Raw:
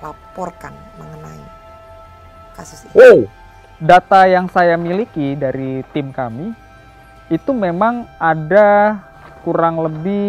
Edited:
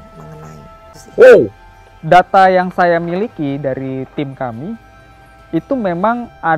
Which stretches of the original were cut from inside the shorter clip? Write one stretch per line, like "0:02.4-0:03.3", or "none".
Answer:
0:01.8-0:02.8